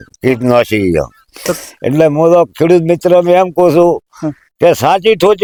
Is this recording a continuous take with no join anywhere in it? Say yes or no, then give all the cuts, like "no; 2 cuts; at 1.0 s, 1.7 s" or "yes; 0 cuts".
yes; 0 cuts